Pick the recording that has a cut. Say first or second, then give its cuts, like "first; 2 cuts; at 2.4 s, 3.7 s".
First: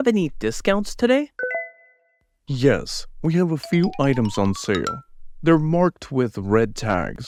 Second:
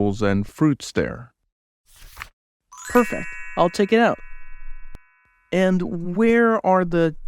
second; 1 cut; at 2.5 s